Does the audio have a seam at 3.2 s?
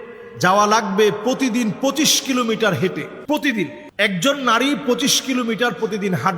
yes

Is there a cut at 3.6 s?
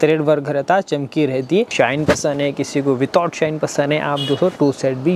no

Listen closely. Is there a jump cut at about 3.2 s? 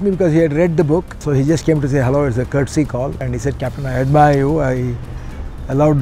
yes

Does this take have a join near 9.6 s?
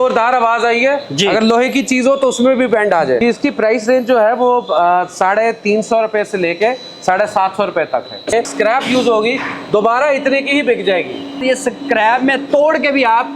no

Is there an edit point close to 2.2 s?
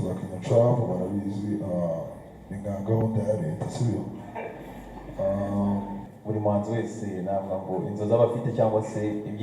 no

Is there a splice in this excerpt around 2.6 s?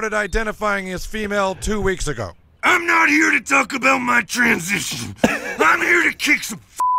no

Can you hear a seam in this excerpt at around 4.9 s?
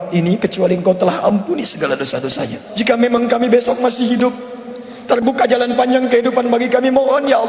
no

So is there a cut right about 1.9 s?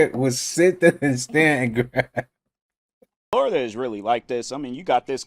no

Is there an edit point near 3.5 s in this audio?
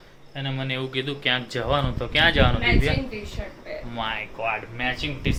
no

